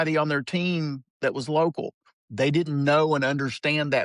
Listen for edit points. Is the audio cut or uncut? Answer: uncut